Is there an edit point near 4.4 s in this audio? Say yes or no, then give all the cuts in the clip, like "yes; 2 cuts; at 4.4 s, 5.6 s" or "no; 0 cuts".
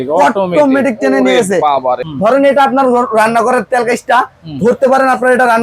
no; 1 cut; at 2.1 s